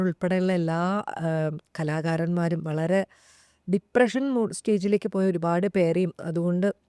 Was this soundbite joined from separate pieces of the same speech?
no; 0 cuts

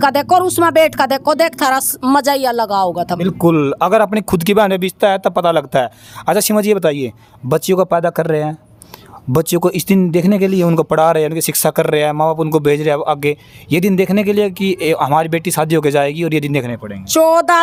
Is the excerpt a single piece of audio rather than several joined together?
yes; 0 cuts

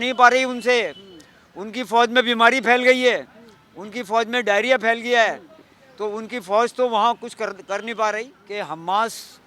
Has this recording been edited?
yes; 1 cut; at 8.4 s

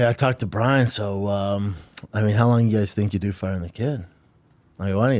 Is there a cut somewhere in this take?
no; 0 cuts

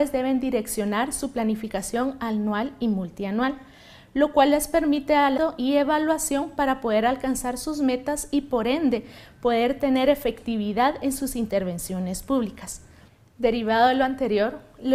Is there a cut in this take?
no; 0 cuts

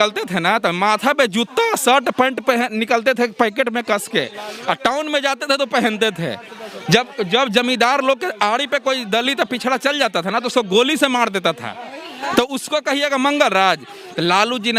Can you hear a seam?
no; 0 cuts

